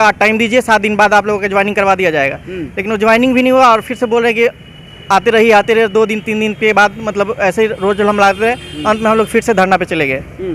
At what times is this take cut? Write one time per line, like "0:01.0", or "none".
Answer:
none